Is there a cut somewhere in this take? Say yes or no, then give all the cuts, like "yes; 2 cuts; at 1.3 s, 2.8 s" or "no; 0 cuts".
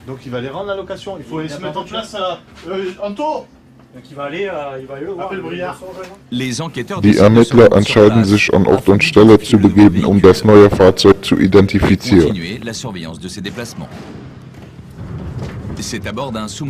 no; 0 cuts